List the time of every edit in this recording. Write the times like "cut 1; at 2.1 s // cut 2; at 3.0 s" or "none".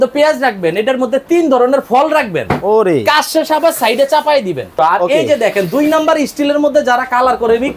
cut 1; at 4.7 s

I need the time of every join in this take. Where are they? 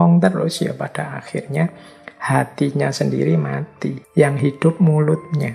cut 1; at 4.0 s

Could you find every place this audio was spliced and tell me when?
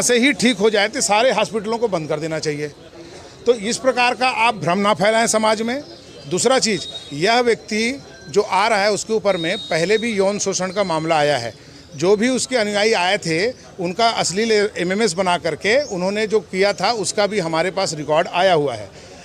none

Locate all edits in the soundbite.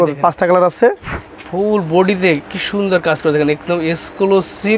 cut 1; at 1.1 s

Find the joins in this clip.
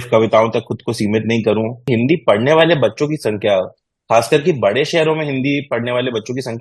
cut 1; at 1.9 s

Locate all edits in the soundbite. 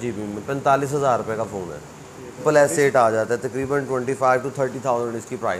cut 1; at 2.4 s

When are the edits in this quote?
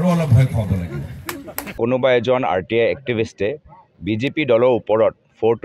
cut 1; at 1.7 s

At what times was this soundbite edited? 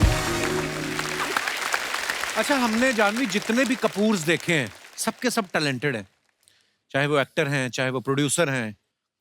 cut 1; at 1.1 s // cut 2; at 2.3 s

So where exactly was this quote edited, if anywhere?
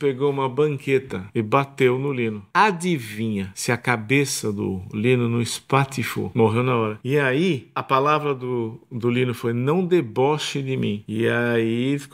cut 1; at 1.2 s // cut 2; at 2.4 s // cut 3; at 3.5 s // cut 4; at 6.3 s // cut 5; at 7.0 s // cut 6; at 7.8 s // cut 7; at 11.0 s

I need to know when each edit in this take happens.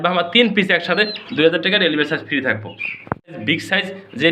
cut 1; at 3.4 s

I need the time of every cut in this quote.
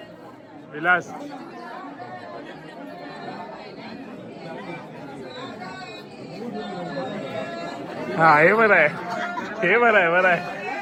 none

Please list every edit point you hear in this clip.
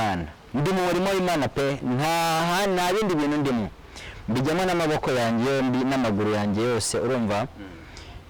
none

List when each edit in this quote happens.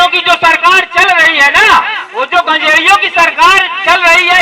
cut 1; at 2.0 s

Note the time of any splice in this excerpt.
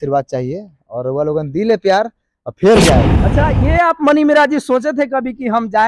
cut 1; at 3.2 s

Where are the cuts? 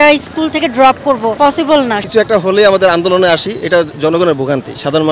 cut 1; at 1.6 s

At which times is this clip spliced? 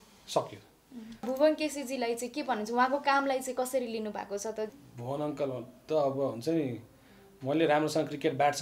cut 1; at 1.3 s // cut 2; at 4.7 s

